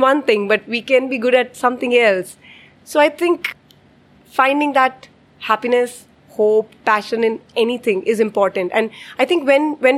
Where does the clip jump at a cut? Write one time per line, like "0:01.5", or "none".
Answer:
0:03.5